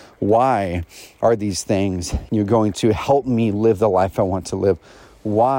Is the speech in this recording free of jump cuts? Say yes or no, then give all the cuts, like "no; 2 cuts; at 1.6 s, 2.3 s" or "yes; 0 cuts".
no; 1 cut; at 2.1 s